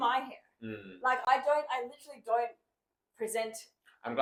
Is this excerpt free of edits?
yes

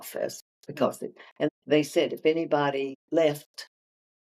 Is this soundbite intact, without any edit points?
no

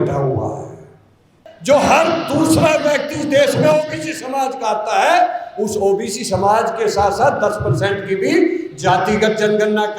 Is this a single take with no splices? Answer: no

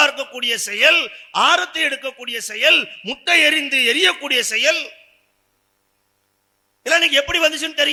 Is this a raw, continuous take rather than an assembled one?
yes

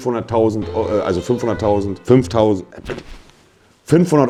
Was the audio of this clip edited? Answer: no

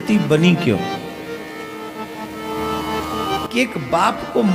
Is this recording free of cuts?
yes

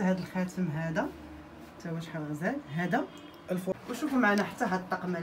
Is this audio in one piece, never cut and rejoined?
no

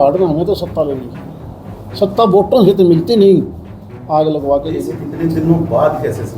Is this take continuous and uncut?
no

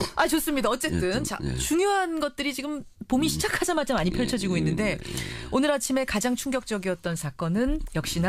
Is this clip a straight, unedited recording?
no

